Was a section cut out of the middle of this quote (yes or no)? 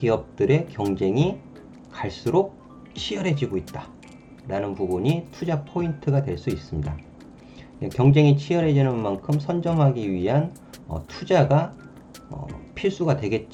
no